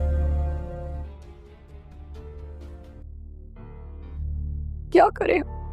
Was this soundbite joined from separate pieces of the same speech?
yes; 2 cuts; at 1.0 s, 2.8 s

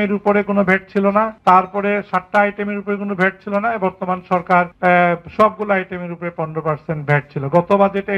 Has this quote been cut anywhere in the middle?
yes; 2 cuts; at 1.3 s, 4.7 s

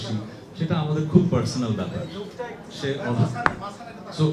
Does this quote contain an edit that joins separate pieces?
no; 0 cuts

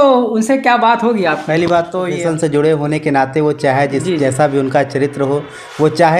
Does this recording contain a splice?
yes; 1 cut; at 2.1 s

